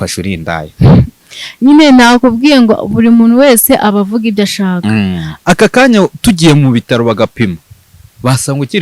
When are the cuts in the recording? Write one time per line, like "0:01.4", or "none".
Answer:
0:05.3